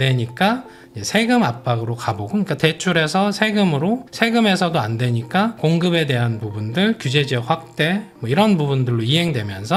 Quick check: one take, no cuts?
yes; 0 cuts

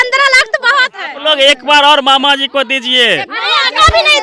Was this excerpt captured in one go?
no; 1 cut; at 1.1 s

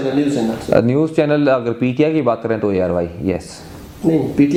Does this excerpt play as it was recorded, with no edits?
yes; 0 cuts

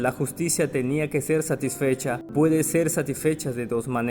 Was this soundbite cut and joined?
yes; 1 cut; at 2.2 s

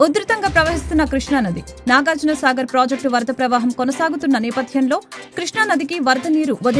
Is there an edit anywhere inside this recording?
no; 0 cuts

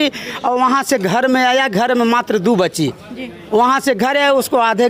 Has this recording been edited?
no; 0 cuts

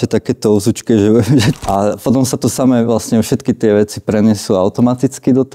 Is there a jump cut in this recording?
yes; 1 cut; at 1.6 s

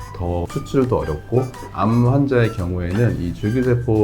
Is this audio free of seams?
no; 1 cut; at 1.7 s

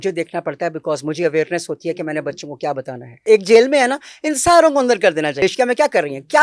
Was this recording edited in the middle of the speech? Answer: yes; 2 cuts; at 3.2 s, 5.4 s

